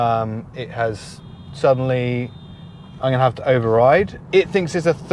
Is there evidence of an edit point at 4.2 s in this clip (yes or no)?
yes